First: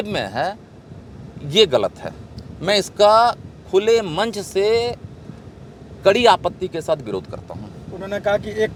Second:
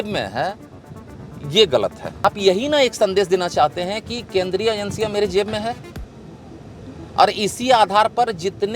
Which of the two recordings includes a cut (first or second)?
second